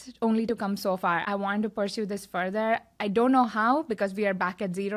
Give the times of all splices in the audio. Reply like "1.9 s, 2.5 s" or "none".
1.2 s

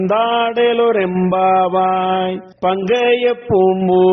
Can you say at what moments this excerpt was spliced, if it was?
2.4 s

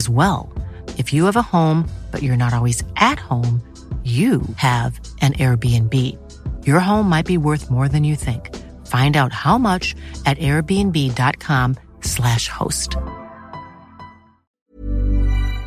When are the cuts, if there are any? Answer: 14.5 s

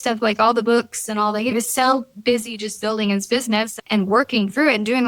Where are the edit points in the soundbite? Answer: 1.5 s

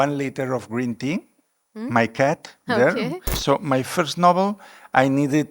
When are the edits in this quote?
3.3 s

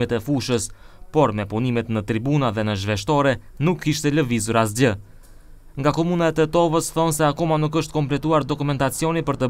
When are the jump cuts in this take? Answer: 1.6 s

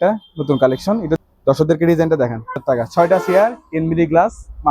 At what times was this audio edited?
1.2 s, 2.6 s

